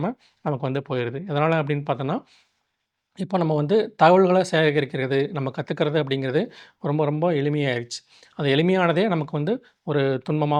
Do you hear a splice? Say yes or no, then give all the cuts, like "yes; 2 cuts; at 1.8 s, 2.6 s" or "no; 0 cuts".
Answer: no; 0 cuts